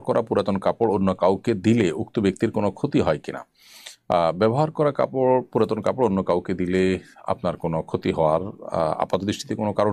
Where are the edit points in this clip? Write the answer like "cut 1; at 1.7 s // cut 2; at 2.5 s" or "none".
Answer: none

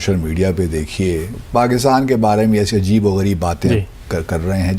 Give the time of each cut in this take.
cut 1; at 1.4 s

